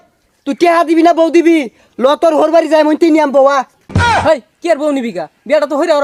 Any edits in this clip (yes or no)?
no